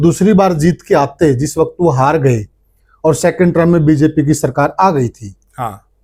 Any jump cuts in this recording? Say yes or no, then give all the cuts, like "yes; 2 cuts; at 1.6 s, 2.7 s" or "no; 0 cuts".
no; 0 cuts